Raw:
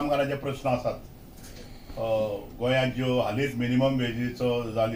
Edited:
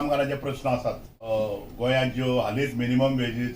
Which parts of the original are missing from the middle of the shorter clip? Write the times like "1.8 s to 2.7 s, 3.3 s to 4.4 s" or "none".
1.1 s to 1.9 s